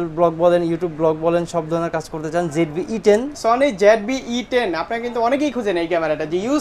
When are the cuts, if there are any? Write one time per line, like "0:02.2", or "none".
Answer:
0:03.3